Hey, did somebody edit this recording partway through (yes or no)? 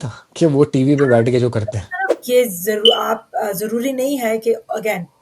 yes